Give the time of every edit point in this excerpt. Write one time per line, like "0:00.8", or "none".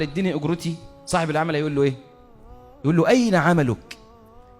none